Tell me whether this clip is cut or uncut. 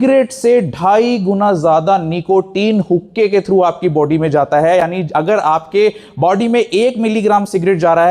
uncut